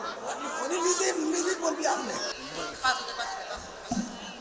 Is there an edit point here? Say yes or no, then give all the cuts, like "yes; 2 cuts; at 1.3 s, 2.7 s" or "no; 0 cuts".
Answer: yes; 1 cut; at 2.3 s